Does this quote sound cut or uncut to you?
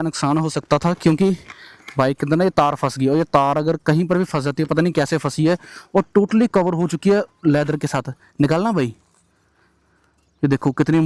uncut